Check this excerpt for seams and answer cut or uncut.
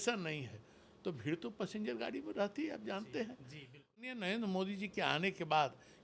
cut